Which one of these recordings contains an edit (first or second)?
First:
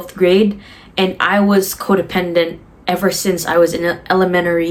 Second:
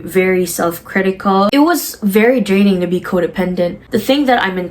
second